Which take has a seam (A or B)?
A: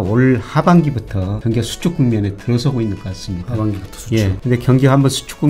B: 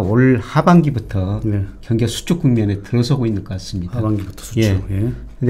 A